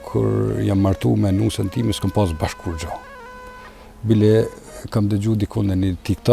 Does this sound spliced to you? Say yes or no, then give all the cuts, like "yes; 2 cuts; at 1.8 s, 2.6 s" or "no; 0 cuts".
no; 0 cuts